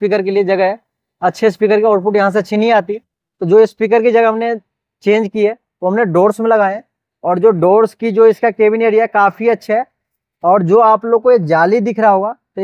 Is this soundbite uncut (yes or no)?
yes